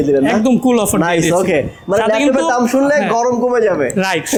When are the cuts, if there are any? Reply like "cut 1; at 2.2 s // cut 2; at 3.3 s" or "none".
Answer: none

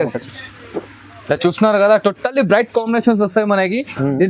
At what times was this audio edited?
none

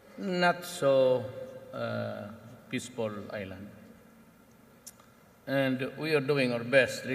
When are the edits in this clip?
cut 1; at 1.1 s

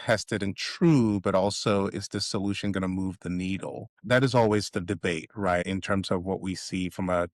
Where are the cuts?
cut 1; at 4.0 s // cut 2; at 5.6 s

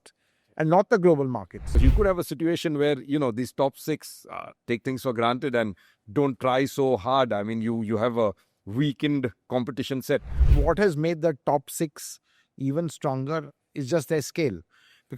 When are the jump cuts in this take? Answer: cut 1; at 1.8 s // cut 2; at 10.4 s

